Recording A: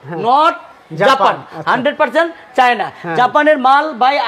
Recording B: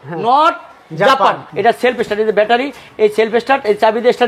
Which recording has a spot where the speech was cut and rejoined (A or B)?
B